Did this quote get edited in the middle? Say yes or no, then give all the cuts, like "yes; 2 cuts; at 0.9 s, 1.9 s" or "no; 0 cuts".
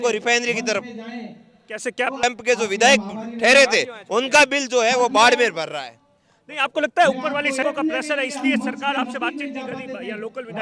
yes; 2 cuts; at 2.2 s, 7.6 s